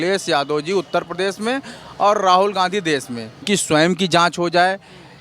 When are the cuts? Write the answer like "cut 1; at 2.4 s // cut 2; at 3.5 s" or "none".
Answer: cut 1; at 3.4 s